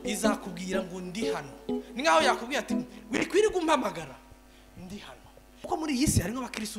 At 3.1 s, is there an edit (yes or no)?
no